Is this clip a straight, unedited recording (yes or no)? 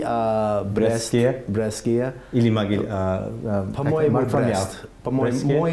yes